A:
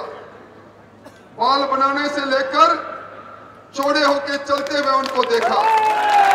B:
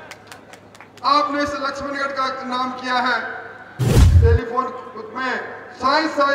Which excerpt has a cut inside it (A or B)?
B